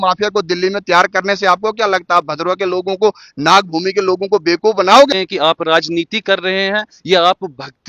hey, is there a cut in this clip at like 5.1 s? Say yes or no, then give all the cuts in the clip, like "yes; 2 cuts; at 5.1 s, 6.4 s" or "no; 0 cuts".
yes; 1 cut; at 5.1 s